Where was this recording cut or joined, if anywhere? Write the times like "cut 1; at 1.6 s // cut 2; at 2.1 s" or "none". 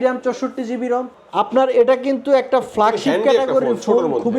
cut 1; at 1.1 s